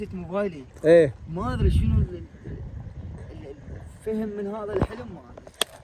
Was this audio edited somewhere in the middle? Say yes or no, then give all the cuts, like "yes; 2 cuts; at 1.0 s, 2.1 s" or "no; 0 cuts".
no; 0 cuts